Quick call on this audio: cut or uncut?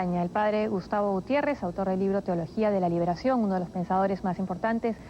cut